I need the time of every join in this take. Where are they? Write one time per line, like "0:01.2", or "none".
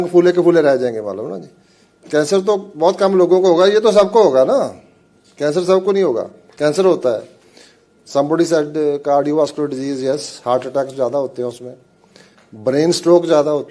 none